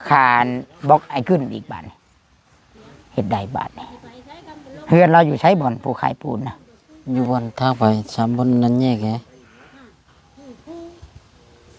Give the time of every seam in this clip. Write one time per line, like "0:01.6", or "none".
0:02.7